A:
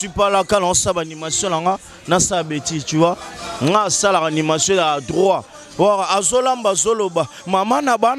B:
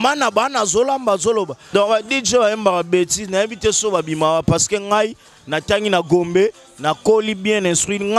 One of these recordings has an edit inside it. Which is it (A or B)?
B